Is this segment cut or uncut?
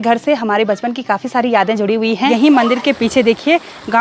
cut